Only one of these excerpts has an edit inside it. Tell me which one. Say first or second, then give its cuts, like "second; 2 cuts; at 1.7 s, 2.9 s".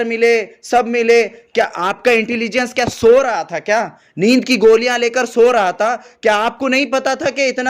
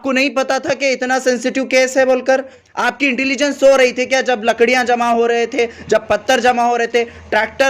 second; 1 cut; at 2.6 s